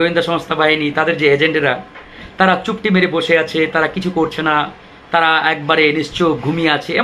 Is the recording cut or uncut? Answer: uncut